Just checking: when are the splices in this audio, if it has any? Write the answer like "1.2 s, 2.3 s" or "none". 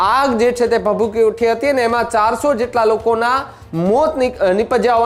none